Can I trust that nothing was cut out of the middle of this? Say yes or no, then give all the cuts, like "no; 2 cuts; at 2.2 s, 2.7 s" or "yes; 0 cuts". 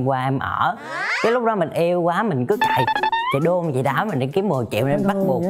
yes; 0 cuts